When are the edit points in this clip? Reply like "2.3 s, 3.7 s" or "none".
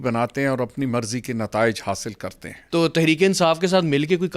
2.6 s